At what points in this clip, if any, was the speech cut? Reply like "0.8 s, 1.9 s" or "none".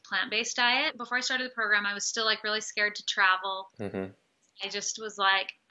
1.0 s

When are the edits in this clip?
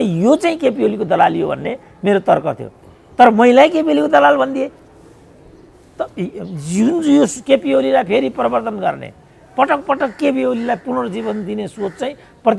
none

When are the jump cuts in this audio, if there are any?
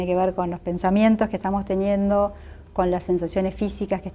none

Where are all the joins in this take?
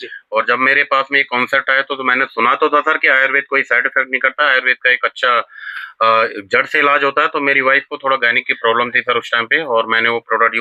none

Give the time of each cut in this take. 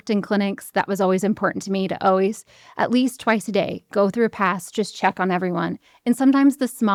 none

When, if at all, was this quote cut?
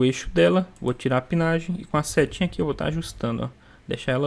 none

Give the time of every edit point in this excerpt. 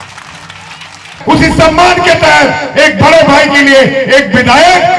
1.1 s

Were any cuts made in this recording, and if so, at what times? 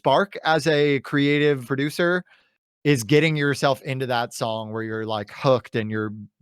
1.6 s

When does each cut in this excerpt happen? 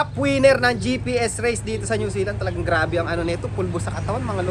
none

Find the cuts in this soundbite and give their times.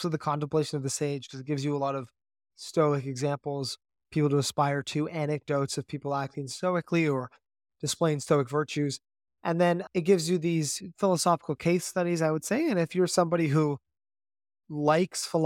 none

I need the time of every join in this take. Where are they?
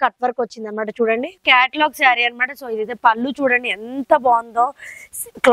1.4 s

